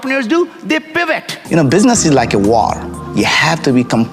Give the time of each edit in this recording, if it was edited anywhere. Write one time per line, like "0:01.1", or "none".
0:01.3